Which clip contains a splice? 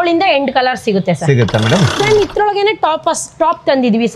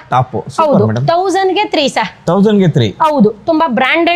first; 1 cut; at 1.9 s

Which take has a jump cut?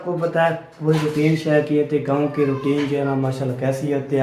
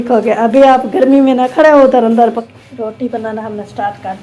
second; 1 cut; at 2.4 s

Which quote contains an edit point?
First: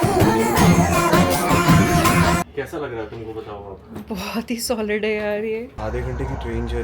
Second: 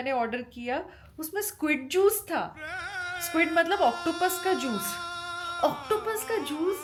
first; 2 cuts; at 2.4 s, 5.7 s

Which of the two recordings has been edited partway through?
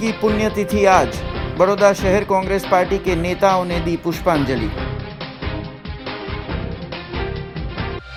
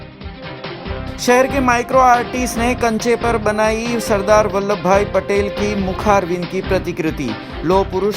second; 1 cut; at 1.0 s

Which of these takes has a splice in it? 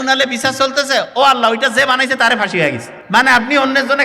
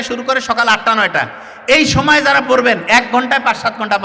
first; 1 cut; at 2.9 s

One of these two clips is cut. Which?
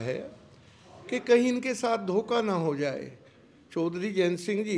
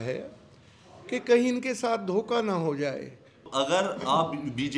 second; 1 cut; at 3.5 s

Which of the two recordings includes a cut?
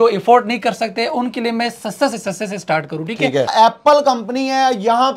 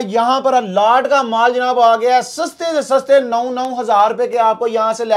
first; 1 cut; at 3.5 s

